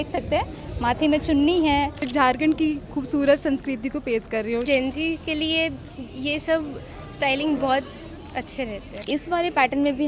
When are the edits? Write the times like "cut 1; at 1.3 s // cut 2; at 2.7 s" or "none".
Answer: cut 1; at 2.1 s // cut 2; at 4.6 s // cut 3; at 9.0 s

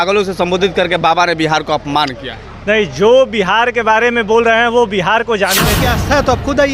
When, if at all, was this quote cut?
cut 1; at 5.8 s

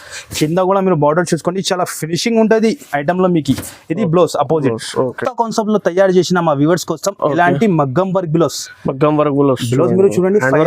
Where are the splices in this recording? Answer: cut 1; at 5.2 s

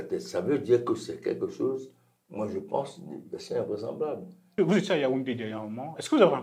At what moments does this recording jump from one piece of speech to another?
cut 1; at 4.4 s

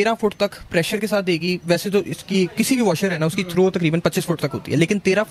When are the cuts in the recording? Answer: none

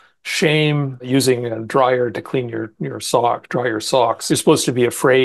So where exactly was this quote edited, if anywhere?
cut 1; at 1.1 s // cut 2; at 4.2 s

